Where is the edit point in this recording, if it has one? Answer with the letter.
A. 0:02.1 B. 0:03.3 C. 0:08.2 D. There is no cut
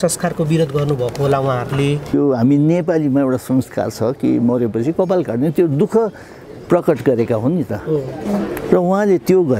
A